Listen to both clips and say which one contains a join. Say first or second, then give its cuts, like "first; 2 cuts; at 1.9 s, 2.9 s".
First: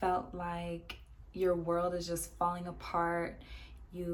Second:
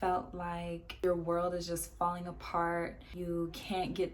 second; 2 cuts; at 0.9 s, 3.1 s